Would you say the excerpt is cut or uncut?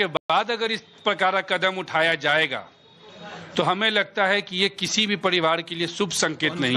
uncut